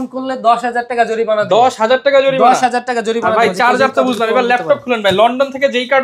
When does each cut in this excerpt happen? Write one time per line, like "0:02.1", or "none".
none